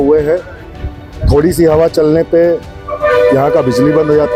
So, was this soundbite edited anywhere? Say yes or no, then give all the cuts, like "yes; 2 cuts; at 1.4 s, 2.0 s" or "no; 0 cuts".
no; 0 cuts